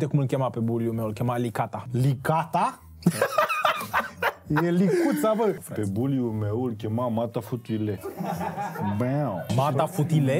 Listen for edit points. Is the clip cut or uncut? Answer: uncut